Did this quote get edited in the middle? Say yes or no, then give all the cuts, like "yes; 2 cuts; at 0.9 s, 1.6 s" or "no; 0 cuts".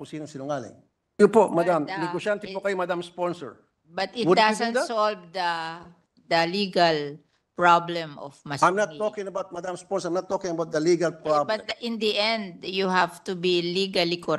yes; 1 cut; at 1.2 s